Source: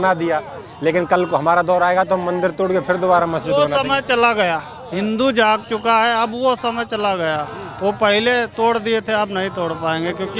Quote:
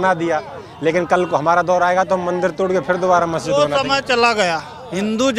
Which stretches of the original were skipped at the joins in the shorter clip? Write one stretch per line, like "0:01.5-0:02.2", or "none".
none